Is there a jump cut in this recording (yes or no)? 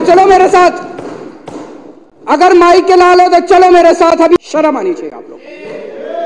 yes